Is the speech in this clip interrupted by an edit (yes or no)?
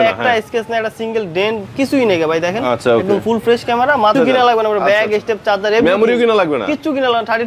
yes